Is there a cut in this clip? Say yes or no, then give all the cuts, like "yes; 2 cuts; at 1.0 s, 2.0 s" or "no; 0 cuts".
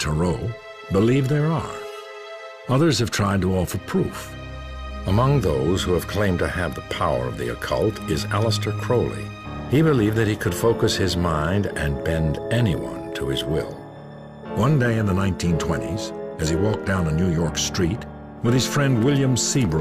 no; 0 cuts